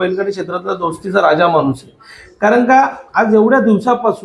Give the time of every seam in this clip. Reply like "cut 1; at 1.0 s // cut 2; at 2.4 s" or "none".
none